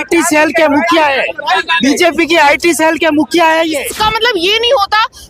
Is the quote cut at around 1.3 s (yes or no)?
no